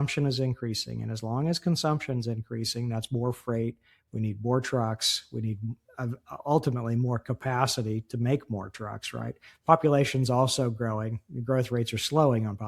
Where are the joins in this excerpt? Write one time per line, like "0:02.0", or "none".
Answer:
none